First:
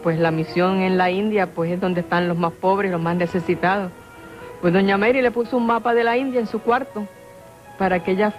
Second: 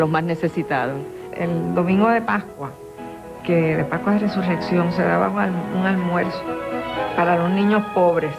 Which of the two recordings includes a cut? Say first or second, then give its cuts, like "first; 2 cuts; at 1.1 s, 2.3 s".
second; 1 cut; at 5.5 s